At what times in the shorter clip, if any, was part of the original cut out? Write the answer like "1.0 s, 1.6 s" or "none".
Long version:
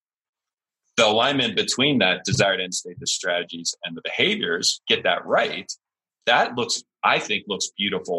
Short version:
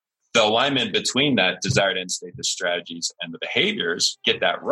none

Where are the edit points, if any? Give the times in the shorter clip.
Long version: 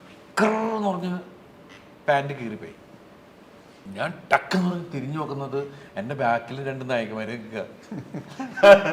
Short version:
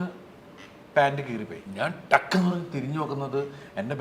1.6 s

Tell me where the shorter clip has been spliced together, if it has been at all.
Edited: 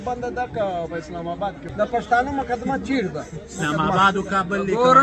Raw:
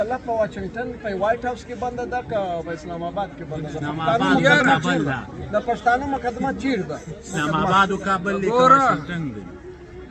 1.6 s

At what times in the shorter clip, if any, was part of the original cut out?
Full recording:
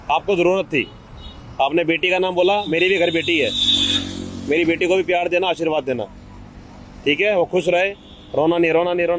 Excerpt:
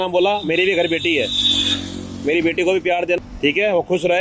3.2 s

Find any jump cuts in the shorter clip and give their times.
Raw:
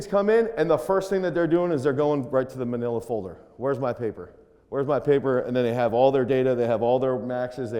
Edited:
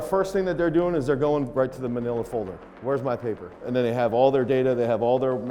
3.7 s

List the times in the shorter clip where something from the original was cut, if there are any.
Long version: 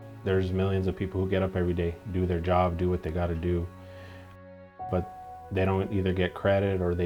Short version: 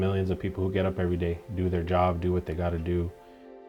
none

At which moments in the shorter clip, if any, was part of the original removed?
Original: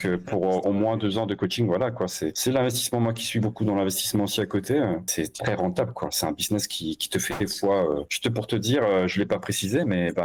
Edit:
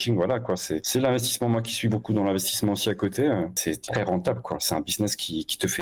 none

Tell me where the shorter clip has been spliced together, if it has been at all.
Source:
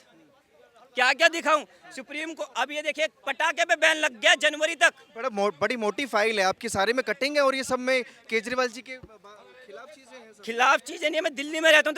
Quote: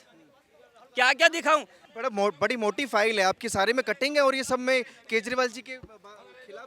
1.9 s

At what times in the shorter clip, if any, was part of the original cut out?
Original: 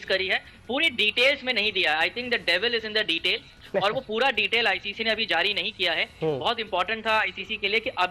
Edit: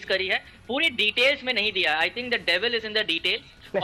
none

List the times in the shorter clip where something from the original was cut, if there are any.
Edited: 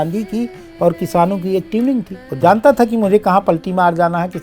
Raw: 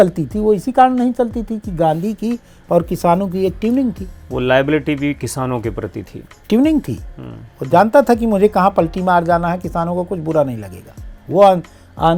2.2 s

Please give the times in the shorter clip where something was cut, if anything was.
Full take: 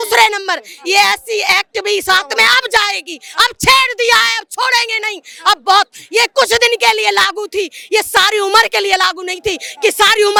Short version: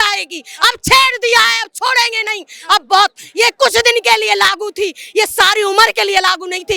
none

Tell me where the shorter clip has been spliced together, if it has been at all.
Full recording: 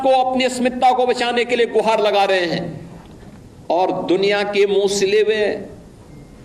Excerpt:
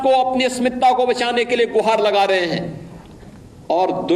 none

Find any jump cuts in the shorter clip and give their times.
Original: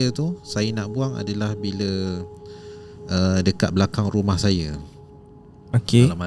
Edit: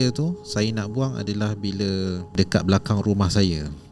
2.4 s

